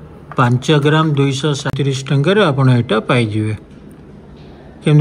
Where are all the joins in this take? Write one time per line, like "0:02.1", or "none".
0:01.8